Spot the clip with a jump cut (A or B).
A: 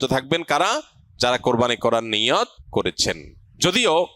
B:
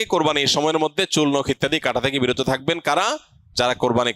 A